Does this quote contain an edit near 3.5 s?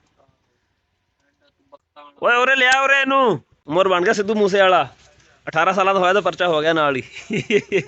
yes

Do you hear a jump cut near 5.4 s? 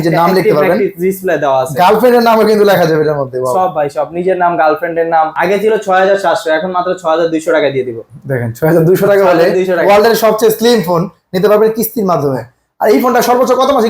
yes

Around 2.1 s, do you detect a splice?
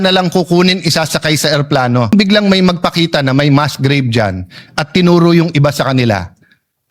yes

